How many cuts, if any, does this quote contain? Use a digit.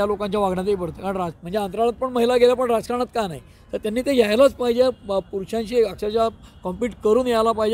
1